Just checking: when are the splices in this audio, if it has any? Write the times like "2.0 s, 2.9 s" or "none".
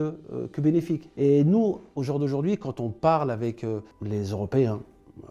1.1 s, 1.9 s, 3.9 s